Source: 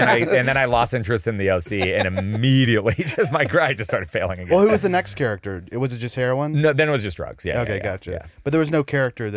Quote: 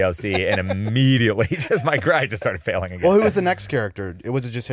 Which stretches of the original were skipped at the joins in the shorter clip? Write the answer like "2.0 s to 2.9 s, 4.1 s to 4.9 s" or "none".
none